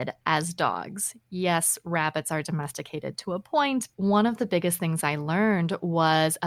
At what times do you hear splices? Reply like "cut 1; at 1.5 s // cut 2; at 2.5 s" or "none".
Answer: cut 1; at 3.9 s